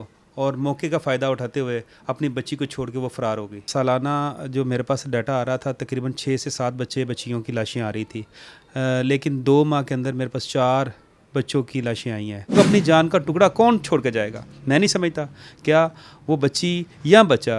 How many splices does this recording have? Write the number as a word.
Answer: two